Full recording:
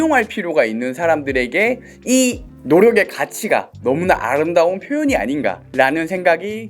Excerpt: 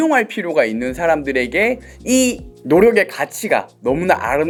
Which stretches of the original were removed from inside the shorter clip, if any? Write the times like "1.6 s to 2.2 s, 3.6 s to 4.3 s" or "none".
none